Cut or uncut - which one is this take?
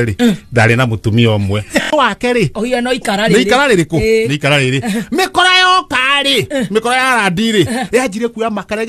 cut